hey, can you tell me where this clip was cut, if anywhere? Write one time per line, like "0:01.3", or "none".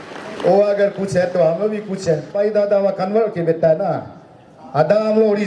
0:02.3

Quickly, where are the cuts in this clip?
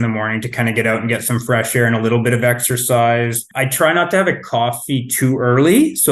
0:03.6

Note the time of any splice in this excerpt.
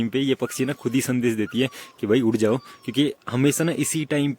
none

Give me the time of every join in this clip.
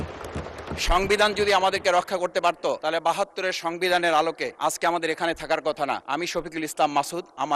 0:02.8
0:04.5
0:06.0

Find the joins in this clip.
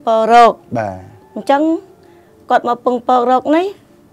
none

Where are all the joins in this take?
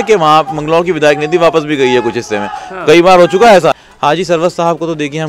0:03.8

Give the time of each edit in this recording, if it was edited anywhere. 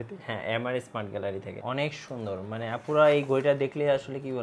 0:01.5

